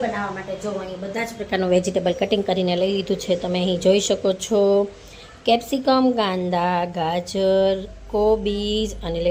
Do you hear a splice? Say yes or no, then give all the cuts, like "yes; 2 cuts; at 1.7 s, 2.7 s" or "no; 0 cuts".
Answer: no; 0 cuts